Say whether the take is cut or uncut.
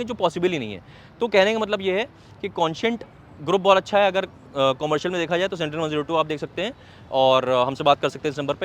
uncut